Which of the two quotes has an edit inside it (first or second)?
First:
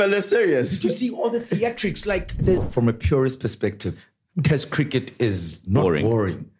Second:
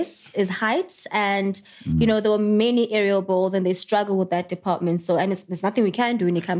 first